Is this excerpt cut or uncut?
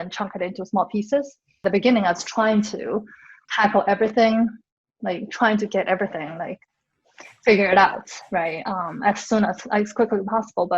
cut